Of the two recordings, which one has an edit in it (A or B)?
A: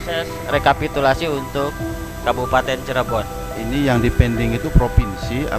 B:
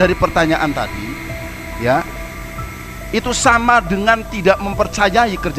A